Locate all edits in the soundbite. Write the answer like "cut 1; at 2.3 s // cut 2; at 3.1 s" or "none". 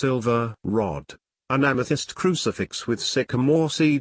cut 1; at 2.9 s